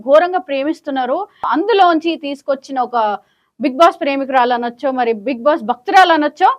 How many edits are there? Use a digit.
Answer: 1